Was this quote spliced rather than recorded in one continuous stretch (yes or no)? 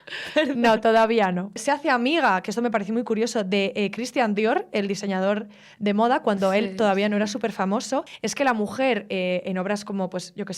yes